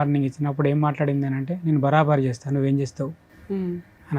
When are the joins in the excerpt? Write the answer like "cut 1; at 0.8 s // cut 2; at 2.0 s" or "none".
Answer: none